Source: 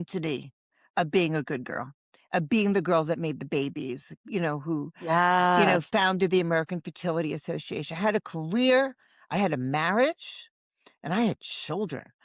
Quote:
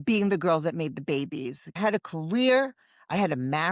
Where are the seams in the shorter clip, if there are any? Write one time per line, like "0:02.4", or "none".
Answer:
0:01.6